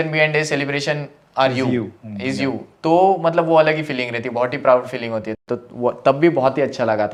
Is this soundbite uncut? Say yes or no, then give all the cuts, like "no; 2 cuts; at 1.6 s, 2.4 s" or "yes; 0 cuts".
yes; 0 cuts